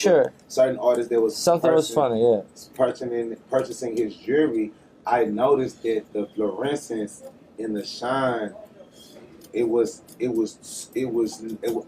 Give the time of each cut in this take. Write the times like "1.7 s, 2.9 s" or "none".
8.6 s